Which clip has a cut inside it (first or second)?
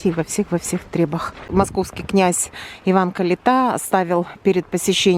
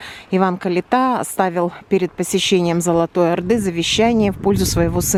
first